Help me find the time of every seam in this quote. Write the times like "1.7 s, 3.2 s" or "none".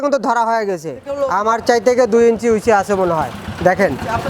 1.2 s